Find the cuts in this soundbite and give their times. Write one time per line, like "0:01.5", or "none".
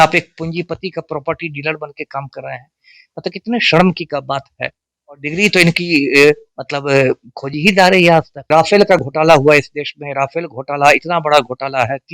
0:08.4